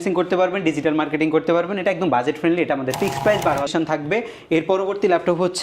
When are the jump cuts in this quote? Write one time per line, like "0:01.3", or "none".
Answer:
0:03.7